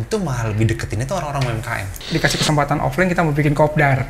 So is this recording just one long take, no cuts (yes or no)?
no